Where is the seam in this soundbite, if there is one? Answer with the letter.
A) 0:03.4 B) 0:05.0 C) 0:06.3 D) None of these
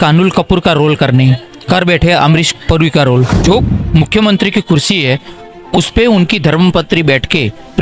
A